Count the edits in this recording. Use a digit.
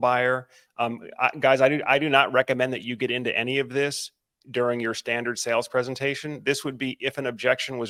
0